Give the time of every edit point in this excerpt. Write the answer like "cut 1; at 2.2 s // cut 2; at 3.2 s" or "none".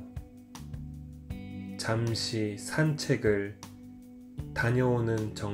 none